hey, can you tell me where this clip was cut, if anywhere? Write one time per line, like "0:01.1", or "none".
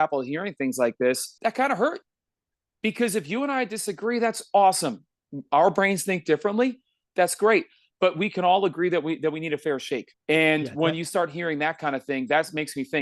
0:01.3
0:10.1